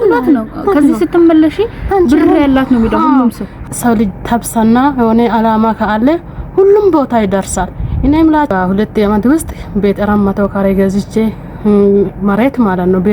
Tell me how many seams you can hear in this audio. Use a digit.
2